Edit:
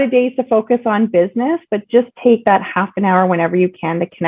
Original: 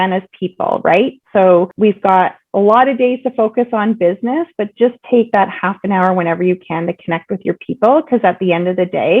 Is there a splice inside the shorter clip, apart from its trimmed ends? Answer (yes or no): no